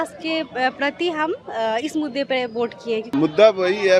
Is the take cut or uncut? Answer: cut